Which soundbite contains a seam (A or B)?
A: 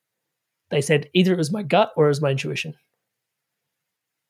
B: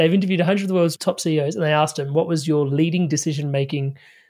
B